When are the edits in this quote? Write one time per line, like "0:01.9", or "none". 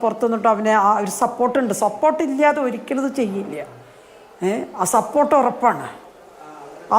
none